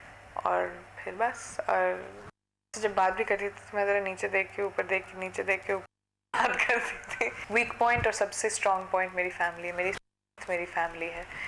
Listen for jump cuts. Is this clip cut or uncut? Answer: cut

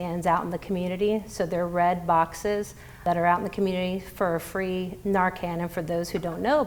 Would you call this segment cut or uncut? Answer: uncut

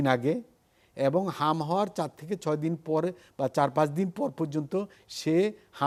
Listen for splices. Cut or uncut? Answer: uncut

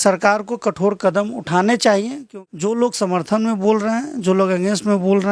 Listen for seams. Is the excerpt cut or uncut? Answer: cut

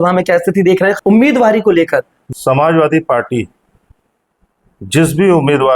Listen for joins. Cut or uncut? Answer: cut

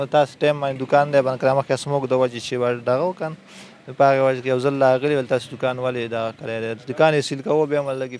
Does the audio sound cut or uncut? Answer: uncut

